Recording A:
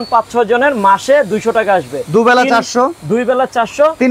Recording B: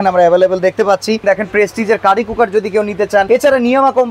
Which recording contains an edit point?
B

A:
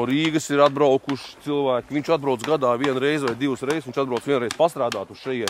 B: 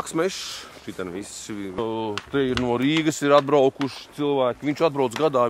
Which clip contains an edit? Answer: B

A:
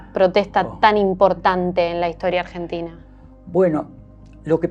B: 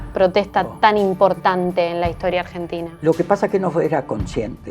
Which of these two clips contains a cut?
B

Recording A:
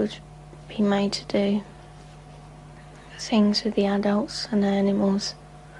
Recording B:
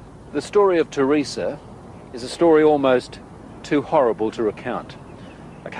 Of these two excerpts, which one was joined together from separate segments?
A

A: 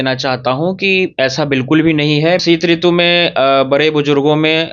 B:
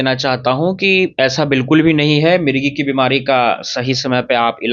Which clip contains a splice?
A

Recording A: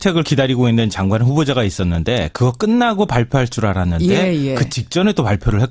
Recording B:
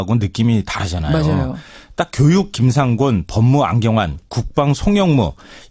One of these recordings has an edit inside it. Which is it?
A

